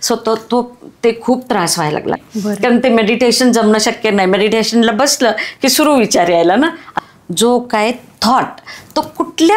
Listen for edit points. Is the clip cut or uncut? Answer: cut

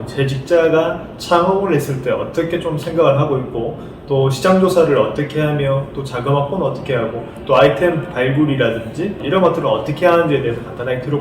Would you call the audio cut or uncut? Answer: cut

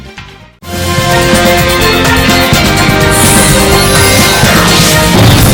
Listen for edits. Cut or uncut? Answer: uncut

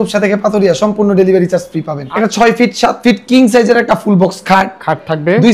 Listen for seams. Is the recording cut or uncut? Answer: cut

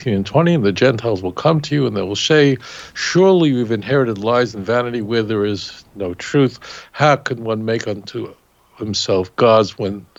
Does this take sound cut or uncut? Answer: uncut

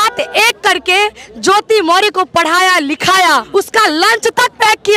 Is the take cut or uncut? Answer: cut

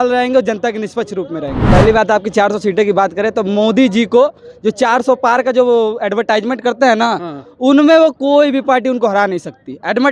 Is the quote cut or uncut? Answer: cut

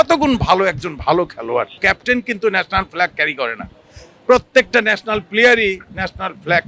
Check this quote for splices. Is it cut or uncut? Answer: cut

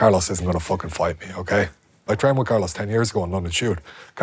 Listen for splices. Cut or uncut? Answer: cut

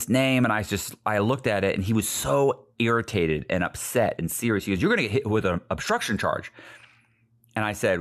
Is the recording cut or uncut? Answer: uncut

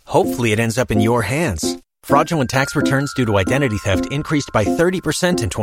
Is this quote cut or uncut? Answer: uncut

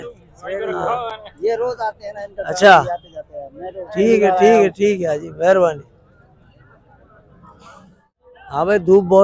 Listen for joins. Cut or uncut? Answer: uncut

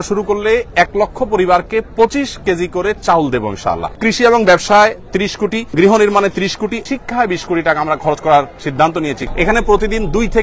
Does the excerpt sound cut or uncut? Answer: cut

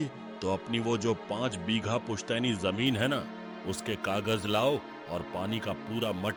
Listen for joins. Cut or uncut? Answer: uncut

